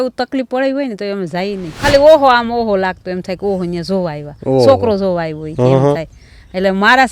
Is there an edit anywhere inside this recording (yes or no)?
yes